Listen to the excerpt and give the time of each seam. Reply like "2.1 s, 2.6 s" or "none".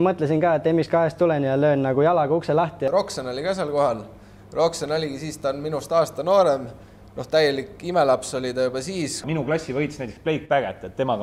2.9 s, 9.2 s